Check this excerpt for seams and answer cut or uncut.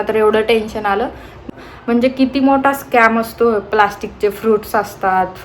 cut